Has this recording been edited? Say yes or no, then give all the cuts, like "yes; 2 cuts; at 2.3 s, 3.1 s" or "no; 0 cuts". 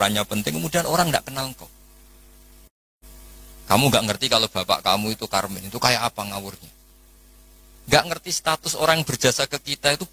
yes; 1 cut; at 3.0 s